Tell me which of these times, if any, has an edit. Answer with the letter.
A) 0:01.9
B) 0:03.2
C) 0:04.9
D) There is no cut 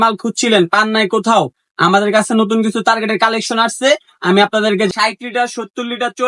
C